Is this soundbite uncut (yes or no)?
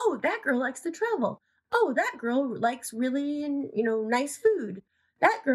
yes